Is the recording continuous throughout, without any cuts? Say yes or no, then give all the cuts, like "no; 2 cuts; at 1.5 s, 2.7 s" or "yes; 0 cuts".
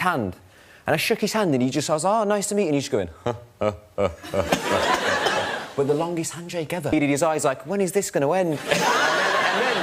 no; 1 cut; at 6.9 s